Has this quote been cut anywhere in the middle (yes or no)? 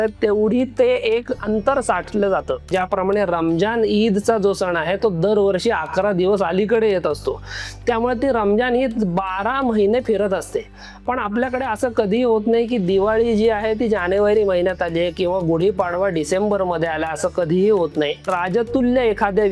yes